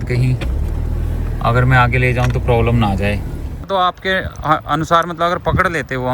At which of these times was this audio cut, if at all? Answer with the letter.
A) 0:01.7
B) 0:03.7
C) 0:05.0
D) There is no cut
B